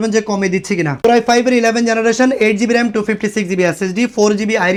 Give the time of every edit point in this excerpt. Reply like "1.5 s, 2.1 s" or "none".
none